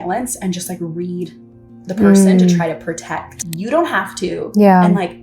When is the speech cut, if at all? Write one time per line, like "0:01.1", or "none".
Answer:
0:03.5

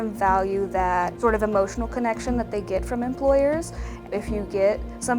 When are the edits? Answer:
0:01.1
0:04.0

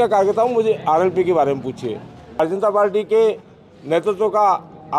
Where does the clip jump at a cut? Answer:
0:02.4

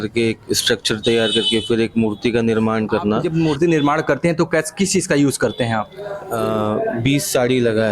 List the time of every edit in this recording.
0:03.2
0:06.2

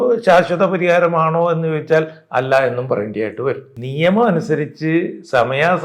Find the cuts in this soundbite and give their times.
0:03.7

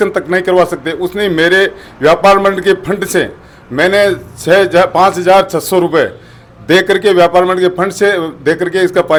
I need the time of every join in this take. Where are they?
none

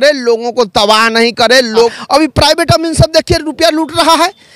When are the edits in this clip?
0:02.0

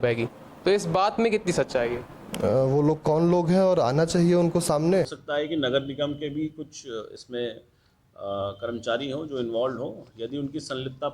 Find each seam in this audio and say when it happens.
0:05.2

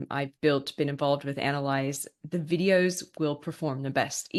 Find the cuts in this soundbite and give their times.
none

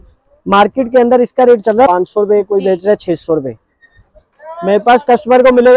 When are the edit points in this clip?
0:01.9

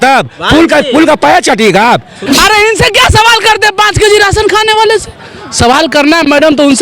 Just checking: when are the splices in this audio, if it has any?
0:02.2

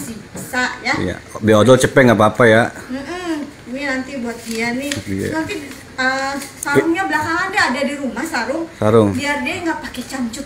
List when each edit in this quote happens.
none

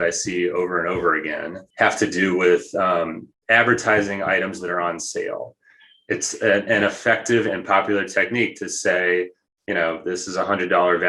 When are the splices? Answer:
0:01.6
0:03.3

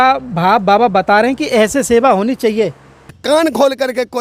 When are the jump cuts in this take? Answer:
0:03.2

